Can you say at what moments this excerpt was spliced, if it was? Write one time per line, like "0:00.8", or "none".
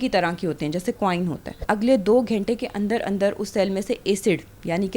0:01.5